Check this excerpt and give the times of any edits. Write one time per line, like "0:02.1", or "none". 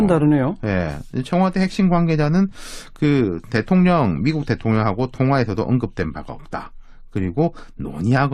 0:03.8